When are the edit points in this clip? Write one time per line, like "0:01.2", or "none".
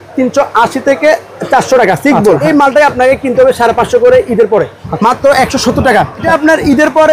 0:02.4
0:04.8
0:06.3